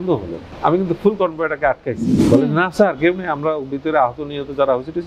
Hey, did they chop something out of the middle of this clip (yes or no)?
yes